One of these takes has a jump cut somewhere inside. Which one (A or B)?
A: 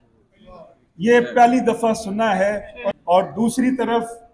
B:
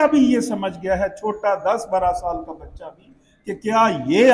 A